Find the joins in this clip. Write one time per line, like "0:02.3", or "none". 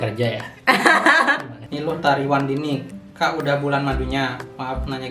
0:01.6